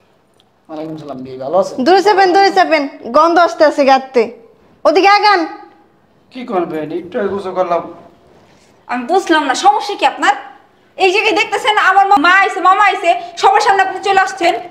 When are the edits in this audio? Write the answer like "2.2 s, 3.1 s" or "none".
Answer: 12.2 s